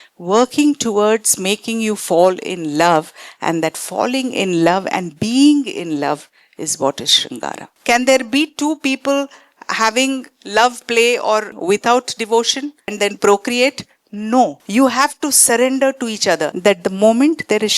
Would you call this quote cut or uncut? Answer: cut